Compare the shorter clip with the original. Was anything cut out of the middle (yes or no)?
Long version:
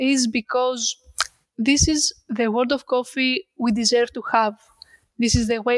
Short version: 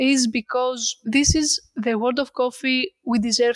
yes